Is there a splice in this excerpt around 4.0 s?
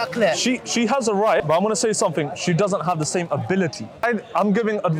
yes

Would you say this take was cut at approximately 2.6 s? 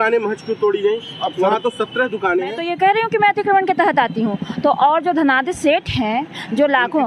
yes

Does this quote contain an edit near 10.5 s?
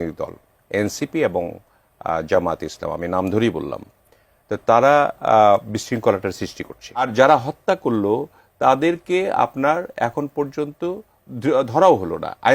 no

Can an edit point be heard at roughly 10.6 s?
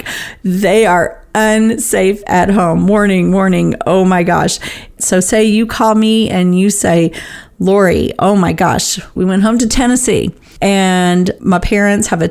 no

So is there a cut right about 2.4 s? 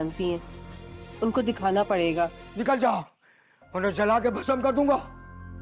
yes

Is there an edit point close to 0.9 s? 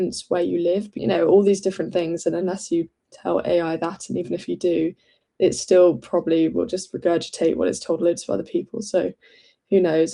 yes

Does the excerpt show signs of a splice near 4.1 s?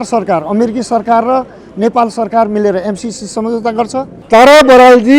yes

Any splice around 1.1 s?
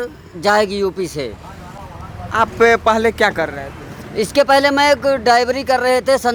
no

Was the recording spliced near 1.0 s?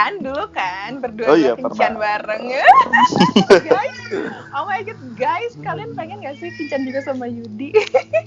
no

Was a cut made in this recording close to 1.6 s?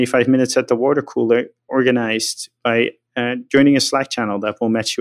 no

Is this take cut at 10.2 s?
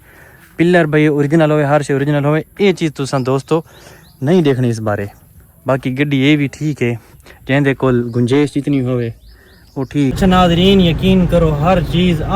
yes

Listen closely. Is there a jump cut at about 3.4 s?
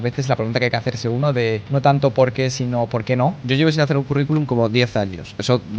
yes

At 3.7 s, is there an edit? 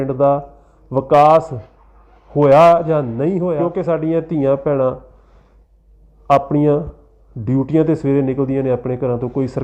yes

